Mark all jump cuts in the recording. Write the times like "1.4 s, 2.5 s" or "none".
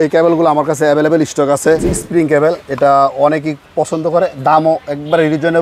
1.8 s